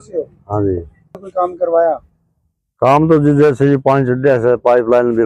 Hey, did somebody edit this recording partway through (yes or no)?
yes